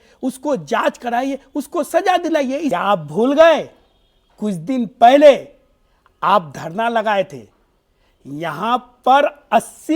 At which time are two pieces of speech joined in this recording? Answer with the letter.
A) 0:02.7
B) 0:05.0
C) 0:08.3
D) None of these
A